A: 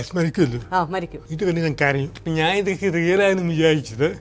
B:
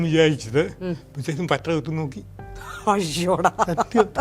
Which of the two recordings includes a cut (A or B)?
A